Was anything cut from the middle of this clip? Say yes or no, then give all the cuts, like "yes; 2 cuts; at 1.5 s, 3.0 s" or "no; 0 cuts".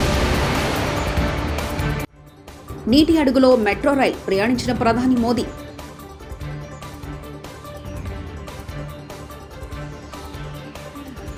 no; 0 cuts